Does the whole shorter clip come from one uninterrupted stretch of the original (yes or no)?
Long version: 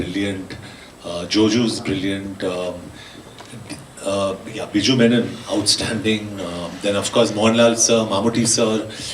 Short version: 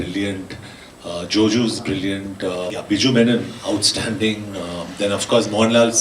no